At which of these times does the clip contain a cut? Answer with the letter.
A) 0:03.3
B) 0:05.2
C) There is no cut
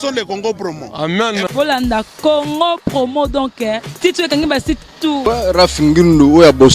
B